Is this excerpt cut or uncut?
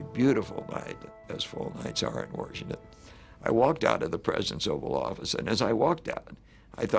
cut